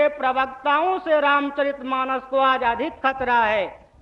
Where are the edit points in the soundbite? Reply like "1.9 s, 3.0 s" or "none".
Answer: none